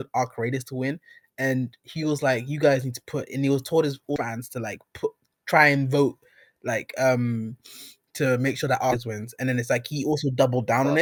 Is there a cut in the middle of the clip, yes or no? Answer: no